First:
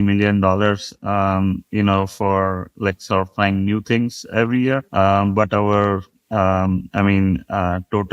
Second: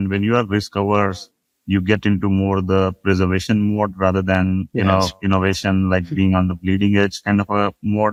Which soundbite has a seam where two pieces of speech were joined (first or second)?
first